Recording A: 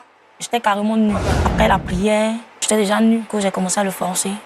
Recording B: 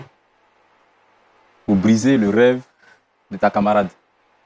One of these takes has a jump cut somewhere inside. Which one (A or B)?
A